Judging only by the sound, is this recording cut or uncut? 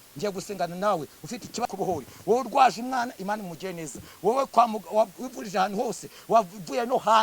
cut